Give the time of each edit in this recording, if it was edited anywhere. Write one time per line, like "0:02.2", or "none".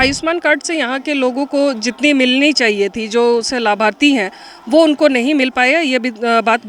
none